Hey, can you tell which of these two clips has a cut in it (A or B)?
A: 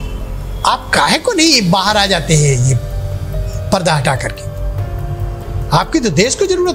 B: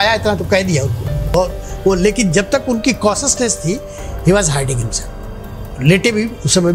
B